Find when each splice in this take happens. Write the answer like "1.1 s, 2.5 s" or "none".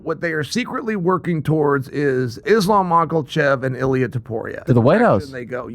2.4 s, 4.6 s